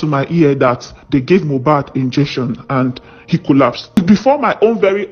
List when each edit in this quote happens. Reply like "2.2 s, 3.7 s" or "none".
3.9 s